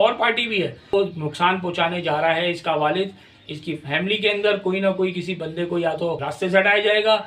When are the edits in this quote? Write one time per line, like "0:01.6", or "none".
0:00.9
0:06.2

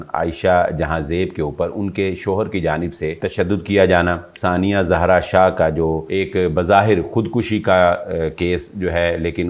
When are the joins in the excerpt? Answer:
0:03.2
0:04.3
0:06.0

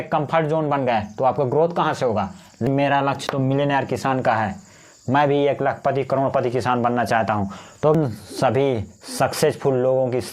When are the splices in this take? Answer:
0:02.7
0:08.0

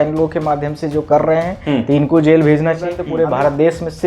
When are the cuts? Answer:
0:03.0

